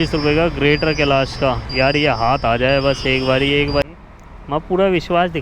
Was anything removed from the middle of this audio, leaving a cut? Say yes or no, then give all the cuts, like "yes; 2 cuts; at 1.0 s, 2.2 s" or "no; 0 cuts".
yes; 1 cut; at 3.8 s